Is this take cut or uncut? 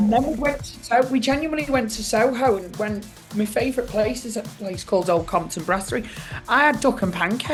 uncut